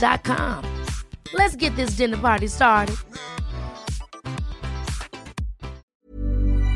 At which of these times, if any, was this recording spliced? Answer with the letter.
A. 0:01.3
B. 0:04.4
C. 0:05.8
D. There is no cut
C